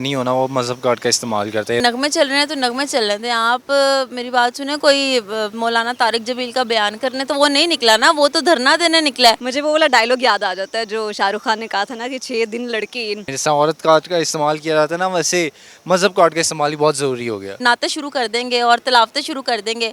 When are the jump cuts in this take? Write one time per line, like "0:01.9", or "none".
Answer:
0:01.8
0:09.5
0:13.3
0:17.6